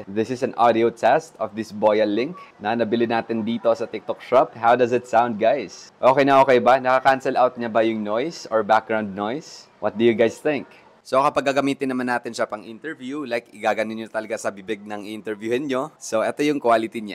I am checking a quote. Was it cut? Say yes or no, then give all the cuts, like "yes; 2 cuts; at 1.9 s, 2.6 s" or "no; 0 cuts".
yes; 1 cut; at 16.0 s